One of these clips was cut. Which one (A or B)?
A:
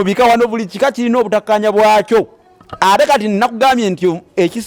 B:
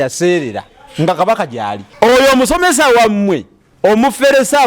B